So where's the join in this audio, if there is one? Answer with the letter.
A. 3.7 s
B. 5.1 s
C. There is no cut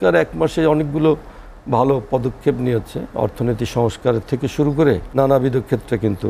B